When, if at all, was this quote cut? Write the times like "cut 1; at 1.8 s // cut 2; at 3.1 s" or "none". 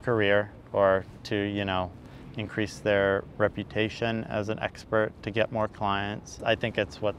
cut 1; at 6.3 s